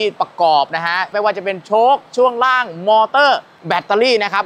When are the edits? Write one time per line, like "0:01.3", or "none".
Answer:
0:01.1